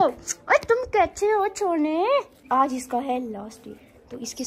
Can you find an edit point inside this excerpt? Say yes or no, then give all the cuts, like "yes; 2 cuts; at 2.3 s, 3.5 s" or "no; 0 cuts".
yes; 1 cut; at 2.4 s